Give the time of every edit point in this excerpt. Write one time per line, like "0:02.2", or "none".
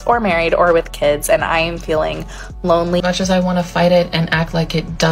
0:03.0